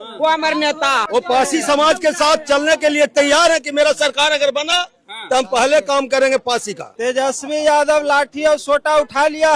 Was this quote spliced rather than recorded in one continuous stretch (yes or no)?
yes